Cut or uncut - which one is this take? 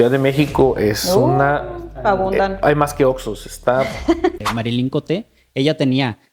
cut